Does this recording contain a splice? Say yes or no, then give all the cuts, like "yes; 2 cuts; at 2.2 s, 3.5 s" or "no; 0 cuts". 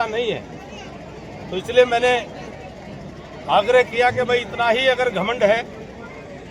no; 0 cuts